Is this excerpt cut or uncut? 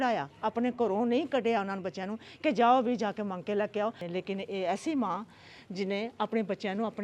cut